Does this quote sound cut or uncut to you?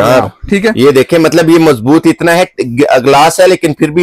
uncut